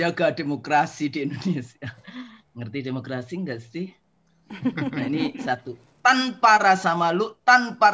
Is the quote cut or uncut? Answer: uncut